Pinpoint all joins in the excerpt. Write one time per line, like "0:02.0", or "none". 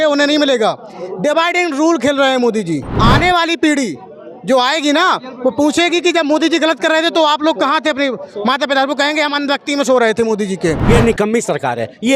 0:02.9
0:10.8